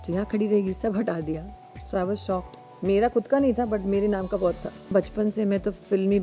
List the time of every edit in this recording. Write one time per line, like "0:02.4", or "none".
0:01.5
0:04.9